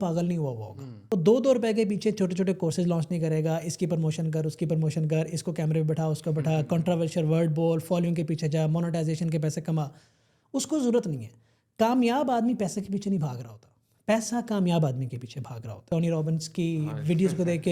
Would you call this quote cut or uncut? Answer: cut